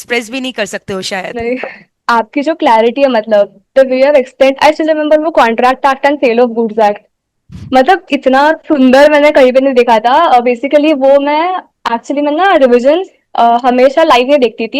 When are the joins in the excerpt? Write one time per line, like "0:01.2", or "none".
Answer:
0:01.9